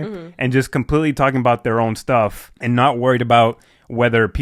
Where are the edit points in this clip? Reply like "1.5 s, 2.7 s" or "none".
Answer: none